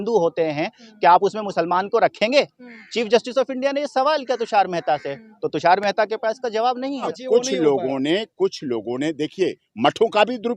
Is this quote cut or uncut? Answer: cut